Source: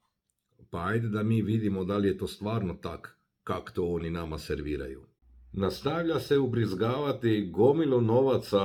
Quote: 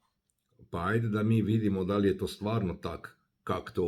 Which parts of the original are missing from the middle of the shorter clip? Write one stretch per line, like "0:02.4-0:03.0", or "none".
none